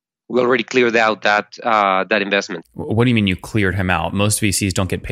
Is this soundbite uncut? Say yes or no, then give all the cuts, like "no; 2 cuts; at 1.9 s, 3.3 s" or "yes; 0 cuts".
no; 1 cut; at 2.6 s